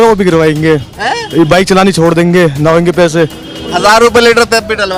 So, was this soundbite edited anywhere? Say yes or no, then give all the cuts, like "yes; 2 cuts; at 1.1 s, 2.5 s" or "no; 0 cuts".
no; 0 cuts